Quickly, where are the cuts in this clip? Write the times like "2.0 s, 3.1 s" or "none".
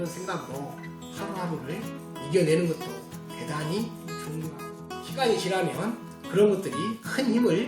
4.5 s